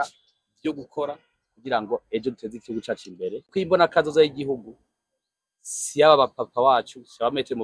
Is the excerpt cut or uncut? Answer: cut